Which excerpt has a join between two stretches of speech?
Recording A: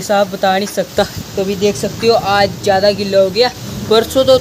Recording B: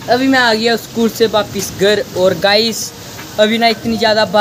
A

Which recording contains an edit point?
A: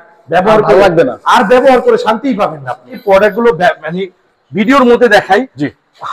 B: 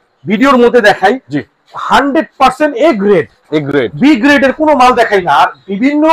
A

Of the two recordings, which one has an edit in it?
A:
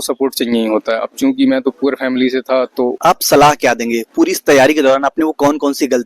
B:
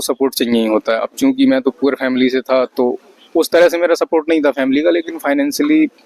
A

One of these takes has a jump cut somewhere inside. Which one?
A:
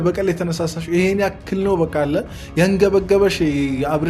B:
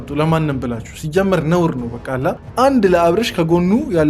B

